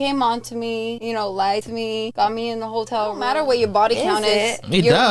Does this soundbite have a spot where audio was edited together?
yes; 1 cut; at 3.2 s

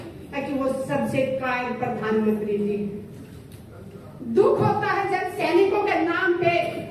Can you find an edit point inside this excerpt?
no; 0 cuts

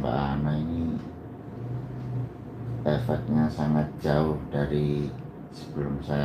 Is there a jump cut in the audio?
no; 0 cuts

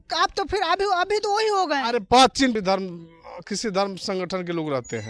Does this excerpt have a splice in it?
yes; 1 cut; at 2.5 s

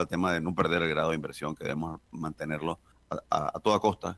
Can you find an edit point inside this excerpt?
yes; 1 cut; at 2.9 s

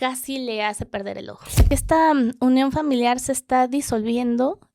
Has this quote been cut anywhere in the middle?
yes; 1 cut; at 1.6 s

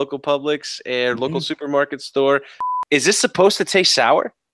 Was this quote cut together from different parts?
yes; 1 cut; at 2.6 s

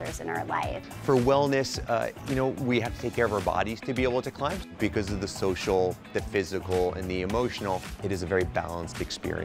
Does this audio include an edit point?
yes; 3 cuts; at 0.9 s, 4.2 s, 7.9 s

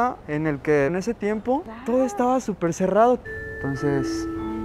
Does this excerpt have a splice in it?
yes; 2 cuts; at 0.9 s, 3.2 s

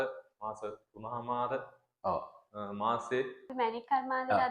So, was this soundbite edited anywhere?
yes; 1 cut; at 3.5 s

